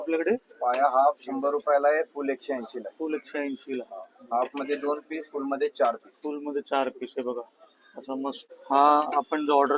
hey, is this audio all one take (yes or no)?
no